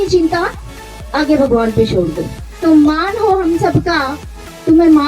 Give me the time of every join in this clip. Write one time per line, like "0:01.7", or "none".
0:02.5